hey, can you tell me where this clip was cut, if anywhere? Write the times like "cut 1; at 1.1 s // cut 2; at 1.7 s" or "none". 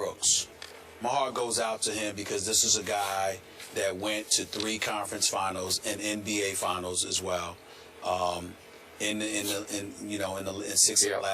cut 1; at 2.4 s